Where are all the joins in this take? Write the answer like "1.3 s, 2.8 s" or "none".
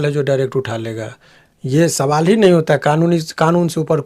none